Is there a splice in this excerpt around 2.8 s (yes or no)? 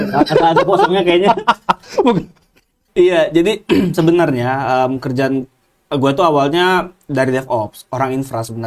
yes